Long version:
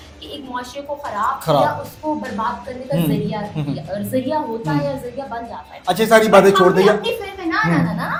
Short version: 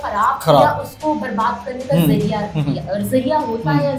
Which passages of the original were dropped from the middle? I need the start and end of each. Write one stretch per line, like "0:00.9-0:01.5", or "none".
none

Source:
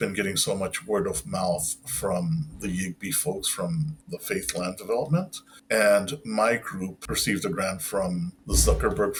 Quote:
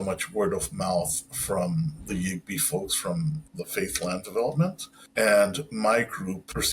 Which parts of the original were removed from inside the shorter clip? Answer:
none

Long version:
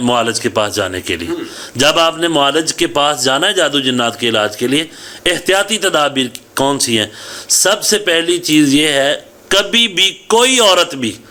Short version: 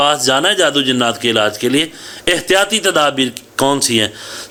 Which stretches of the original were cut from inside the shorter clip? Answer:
none

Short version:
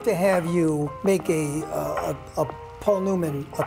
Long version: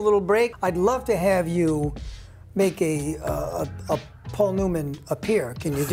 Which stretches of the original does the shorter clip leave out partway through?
0:01.9-0:02.4

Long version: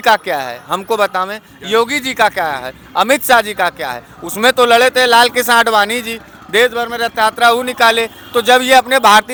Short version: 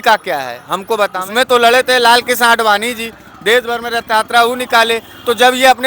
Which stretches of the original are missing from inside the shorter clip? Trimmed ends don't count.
0:01.2-0:04.3

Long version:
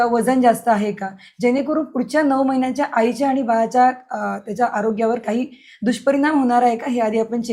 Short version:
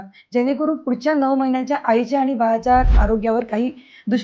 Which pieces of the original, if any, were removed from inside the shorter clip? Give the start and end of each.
0:04.1-0:04.7

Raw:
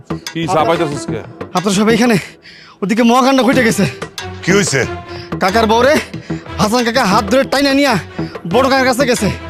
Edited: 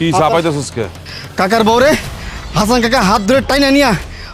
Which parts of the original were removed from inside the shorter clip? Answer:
0:01.4-0:05.0

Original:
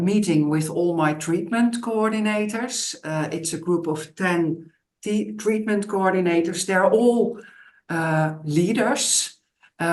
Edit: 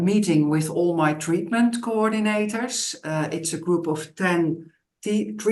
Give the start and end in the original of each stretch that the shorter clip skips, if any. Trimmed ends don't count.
none

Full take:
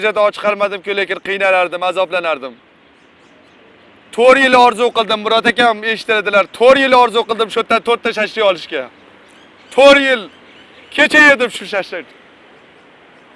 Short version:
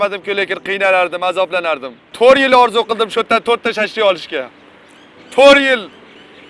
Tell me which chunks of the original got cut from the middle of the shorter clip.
0:02.7-0:06.5

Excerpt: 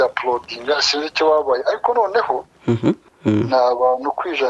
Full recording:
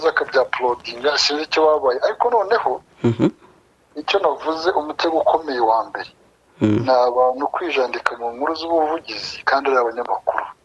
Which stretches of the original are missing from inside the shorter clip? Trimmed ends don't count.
0:03.5-0:06.4

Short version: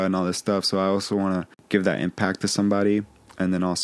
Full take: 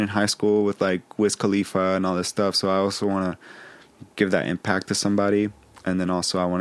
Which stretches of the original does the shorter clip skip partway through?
0:03.4-0:04.0

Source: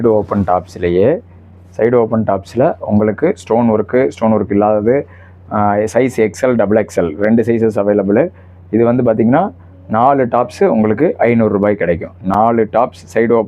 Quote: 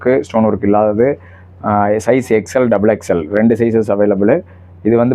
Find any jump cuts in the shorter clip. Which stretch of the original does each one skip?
none

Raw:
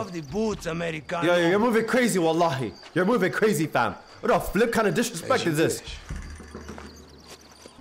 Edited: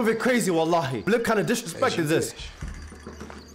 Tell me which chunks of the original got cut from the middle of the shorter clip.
0:02.7-0:04.5

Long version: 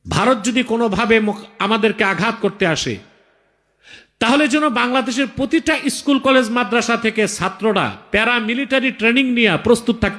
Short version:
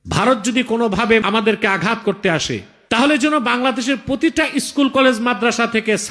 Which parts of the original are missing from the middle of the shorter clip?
0:01.2-0:01.6
0:03.1-0:04.0

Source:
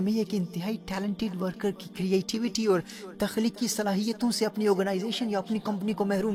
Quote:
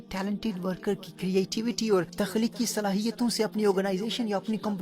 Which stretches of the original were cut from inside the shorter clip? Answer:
0:02.9-0:03.1

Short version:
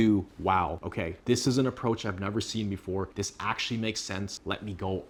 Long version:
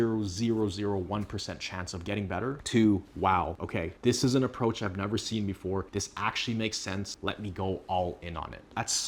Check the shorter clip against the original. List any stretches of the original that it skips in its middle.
none

